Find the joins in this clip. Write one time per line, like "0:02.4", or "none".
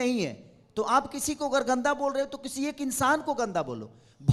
none